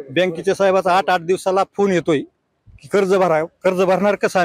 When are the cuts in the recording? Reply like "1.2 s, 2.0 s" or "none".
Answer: none